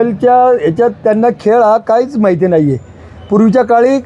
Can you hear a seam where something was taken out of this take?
no; 0 cuts

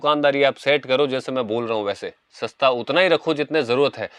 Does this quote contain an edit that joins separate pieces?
no; 0 cuts

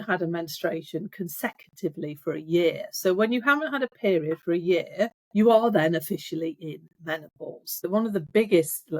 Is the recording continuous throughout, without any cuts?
no; 1 cut; at 7.7 s

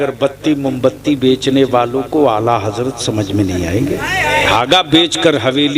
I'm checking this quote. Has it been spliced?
yes; 1 cut; at 4.5 s

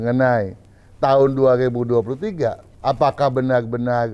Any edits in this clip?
yes; 1 cut; at 2.7 s

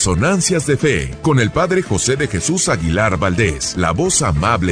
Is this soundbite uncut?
no; 2 cuts; at 1.1 s, 3.6 s

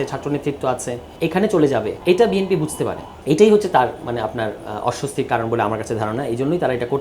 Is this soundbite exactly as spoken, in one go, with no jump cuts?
no; 3 cuts; at 1.0 s, 1.9 s, 3.1 s

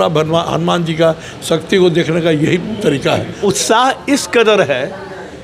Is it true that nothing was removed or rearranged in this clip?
no; 1 cut; at 3.4 s

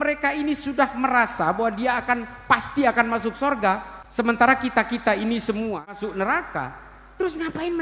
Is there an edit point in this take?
yes; 2 cuts; at 4.0 s, 6.0 s

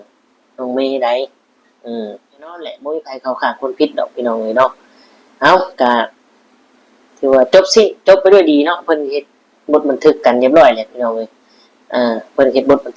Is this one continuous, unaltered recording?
no; 1 cut; at 2.8 s

